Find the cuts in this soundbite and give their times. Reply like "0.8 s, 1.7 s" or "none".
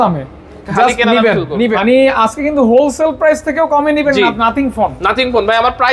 1.7 s